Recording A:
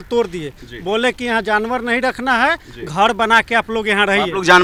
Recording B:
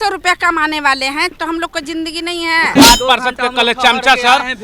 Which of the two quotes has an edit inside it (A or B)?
B